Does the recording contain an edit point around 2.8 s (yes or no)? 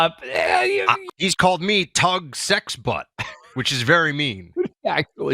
no